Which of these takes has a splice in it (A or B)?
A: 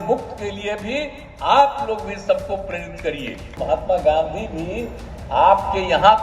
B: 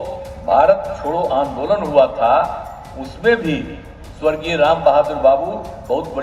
A